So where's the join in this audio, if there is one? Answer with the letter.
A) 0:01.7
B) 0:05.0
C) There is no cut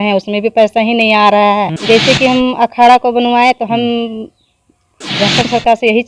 A